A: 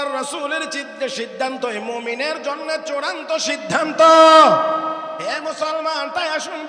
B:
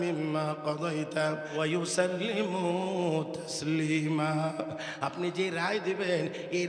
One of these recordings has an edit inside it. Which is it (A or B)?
B